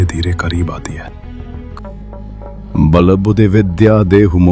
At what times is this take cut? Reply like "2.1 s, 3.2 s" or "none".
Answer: 1.8 s